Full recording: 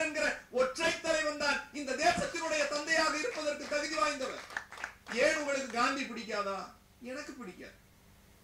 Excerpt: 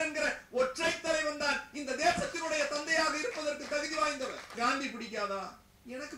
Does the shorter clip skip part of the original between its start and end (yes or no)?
yes